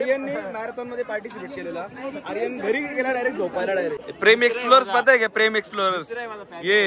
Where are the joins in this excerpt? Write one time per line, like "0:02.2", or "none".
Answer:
0:04.0